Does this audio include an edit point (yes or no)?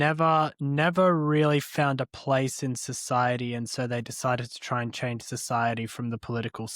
no